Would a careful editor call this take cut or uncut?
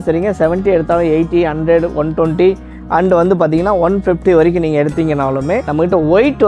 uncut